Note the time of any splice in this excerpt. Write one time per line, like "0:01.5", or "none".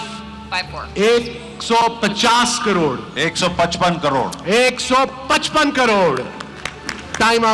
0:03.1

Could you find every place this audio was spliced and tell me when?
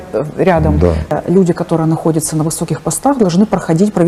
0:01.2

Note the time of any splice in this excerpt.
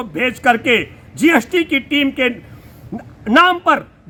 none

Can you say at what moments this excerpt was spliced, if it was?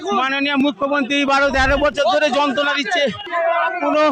0:03.2

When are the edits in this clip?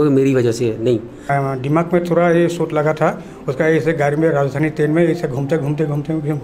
0:01.3

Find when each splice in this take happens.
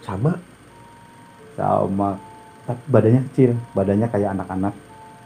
none

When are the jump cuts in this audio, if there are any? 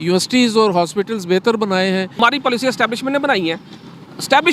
0:02.2

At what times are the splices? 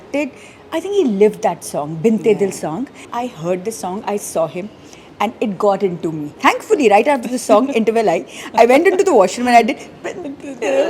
0:03.0
0:06.3

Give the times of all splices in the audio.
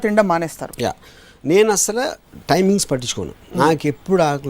none

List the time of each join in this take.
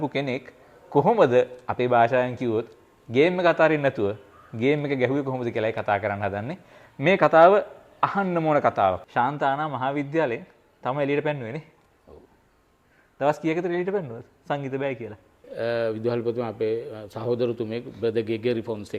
0:09.0
0:15.4

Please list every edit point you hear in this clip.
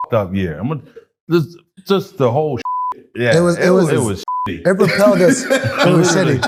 none

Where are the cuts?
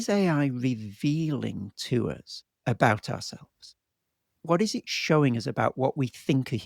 none

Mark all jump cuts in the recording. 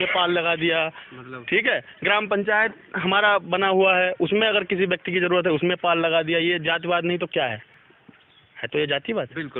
none

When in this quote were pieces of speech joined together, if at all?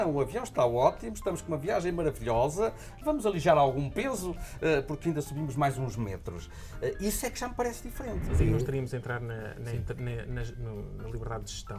0:08.2

